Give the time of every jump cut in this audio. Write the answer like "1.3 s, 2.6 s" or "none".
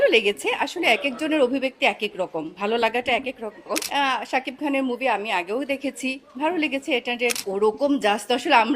3.9 s, 7.4 s